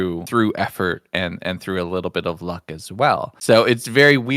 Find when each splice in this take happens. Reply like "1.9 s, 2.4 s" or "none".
none

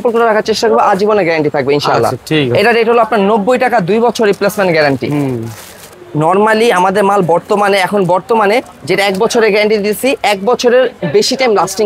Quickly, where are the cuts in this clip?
none

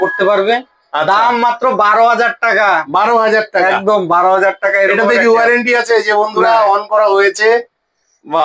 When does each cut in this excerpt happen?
none

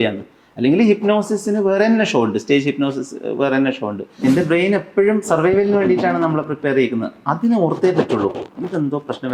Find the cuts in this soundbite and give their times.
4.2 s

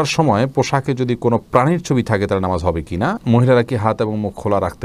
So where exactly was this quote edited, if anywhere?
3.2 s

